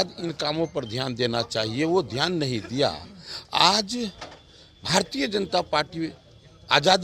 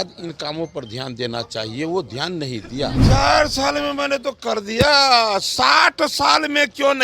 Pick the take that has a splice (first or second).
second